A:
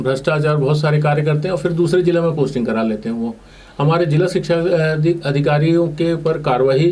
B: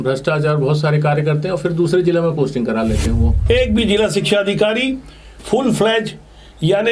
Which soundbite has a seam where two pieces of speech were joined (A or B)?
B